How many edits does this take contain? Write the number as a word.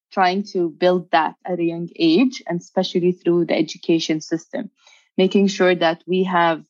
zero